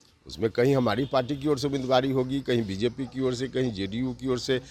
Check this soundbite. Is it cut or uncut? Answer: uncut